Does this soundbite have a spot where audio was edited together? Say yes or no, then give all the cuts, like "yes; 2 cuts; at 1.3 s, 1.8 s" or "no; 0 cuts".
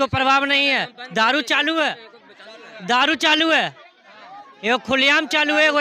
no; 0 cuts